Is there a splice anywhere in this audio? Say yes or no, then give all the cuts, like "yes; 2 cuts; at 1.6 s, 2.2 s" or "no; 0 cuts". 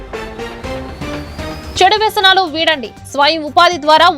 yes; 1 cut; at 1.7 s